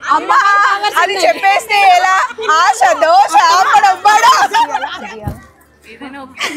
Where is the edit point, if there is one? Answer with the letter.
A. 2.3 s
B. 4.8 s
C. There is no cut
B